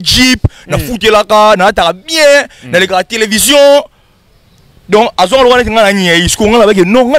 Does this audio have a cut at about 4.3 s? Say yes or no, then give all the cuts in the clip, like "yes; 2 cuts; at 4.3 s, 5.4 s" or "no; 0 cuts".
no; 0 cuts